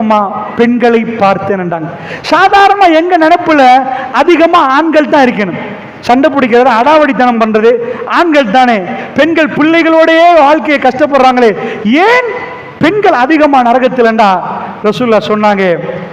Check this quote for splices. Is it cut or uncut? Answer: uncut